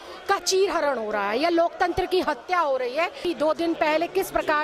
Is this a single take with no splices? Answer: no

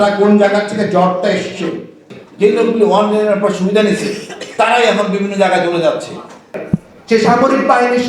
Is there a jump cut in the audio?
yes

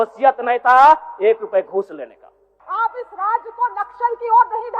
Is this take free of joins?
no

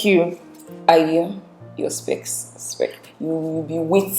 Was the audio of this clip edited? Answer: yes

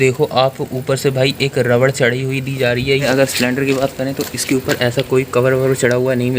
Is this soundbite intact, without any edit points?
no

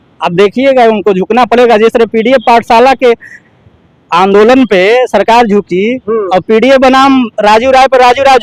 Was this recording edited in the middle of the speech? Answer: no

